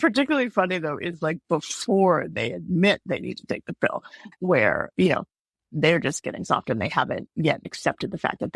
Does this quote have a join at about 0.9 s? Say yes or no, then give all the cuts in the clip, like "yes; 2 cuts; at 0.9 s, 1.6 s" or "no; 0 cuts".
no; 1 cut; at 4.2 s